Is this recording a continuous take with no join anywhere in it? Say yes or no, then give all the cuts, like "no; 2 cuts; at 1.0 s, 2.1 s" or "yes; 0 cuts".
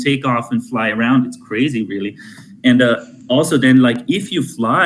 yes; 0 cuts